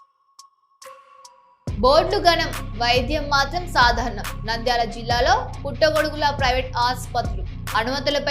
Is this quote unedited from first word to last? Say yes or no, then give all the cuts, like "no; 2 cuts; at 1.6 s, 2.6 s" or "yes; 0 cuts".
no; 1 cut; at 1.2 s